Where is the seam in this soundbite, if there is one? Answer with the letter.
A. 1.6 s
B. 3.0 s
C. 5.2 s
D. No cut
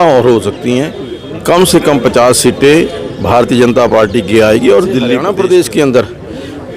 C